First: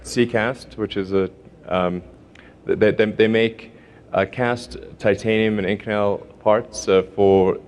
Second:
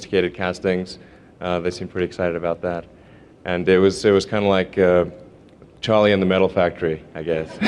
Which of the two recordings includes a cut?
second; 1 cut; at 3.4 s

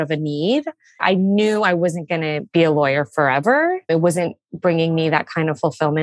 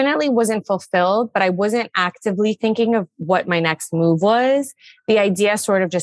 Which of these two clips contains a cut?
first; 3 cuts; at 1.0 s, 2.4 s, 3.8 s

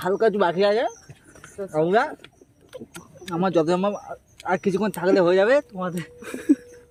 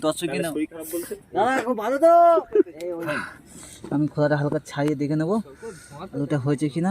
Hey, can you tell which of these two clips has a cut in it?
second; 1 cut; at 3.1 s

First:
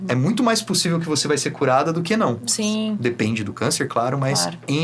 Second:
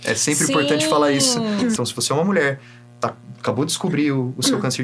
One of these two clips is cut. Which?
second; 1 cut; at 1.8 s

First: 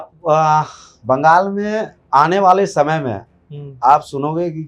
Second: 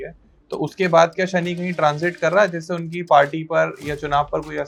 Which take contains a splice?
first; 1 cut; at 1.9 s

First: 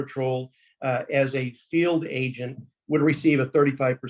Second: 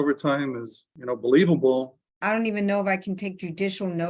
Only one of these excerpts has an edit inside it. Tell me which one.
second; 2 cuts; at 0.9 s, 2.0 s

